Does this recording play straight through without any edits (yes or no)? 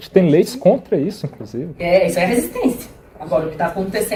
yes